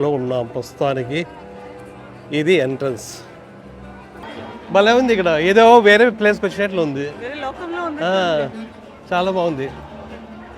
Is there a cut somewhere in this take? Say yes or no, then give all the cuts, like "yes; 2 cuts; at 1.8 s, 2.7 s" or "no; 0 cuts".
yes; 1 cut; at 4.2 s